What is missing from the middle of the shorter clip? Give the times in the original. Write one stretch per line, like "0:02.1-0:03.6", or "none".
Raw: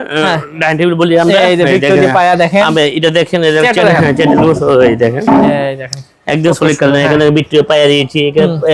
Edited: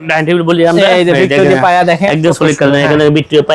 0:02.6-0:06.2